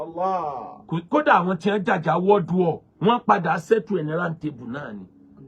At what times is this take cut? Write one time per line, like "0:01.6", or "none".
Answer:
none